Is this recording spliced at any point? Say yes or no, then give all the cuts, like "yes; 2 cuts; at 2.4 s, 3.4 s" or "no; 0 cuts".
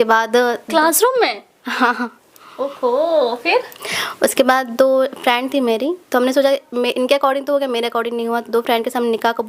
no; 0 cuts